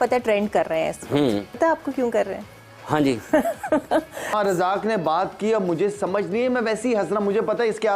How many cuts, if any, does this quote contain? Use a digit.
2